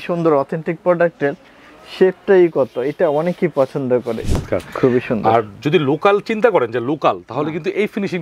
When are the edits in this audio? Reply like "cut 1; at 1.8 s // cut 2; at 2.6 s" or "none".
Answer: cut 1; at 4.4 s